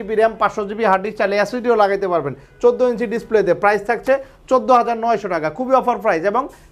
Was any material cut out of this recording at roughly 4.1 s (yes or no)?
no